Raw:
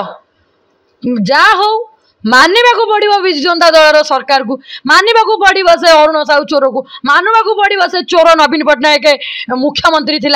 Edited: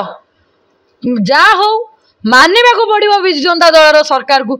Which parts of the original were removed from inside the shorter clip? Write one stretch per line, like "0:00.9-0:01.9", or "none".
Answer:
none